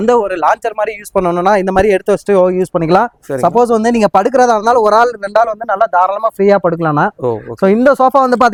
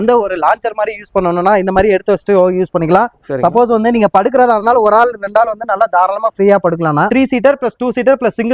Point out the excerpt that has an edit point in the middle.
second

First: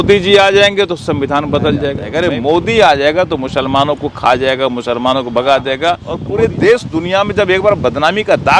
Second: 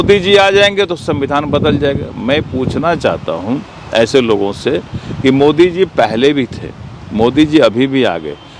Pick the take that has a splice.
first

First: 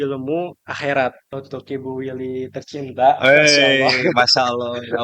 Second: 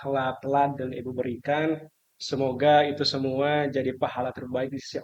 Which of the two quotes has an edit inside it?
first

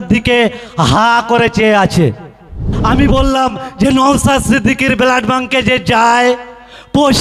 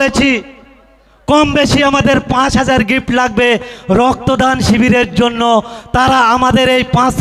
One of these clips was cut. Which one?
first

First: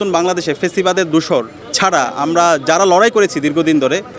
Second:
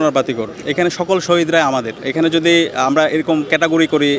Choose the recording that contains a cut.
second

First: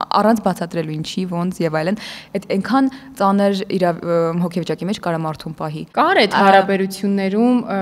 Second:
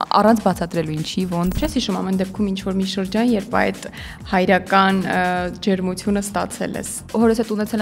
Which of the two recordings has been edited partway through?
second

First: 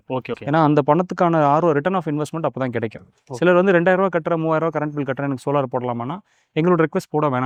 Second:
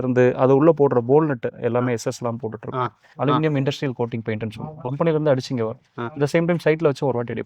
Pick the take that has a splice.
second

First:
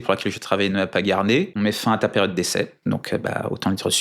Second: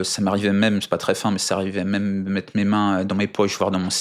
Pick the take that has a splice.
first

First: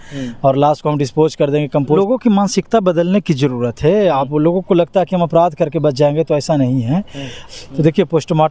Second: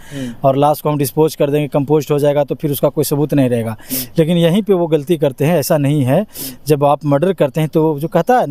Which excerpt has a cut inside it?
first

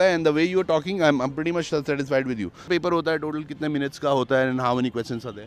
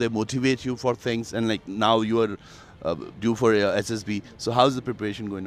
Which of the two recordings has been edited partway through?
first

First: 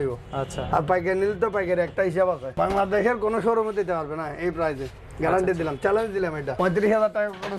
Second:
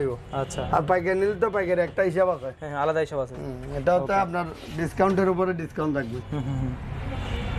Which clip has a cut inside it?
first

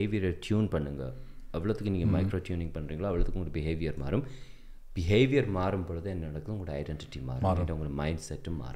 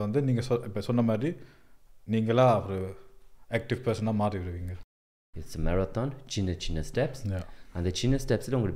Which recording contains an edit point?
second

